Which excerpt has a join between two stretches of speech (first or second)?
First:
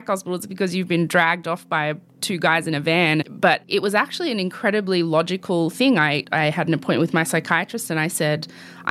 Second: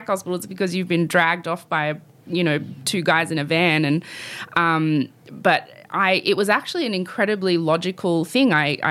first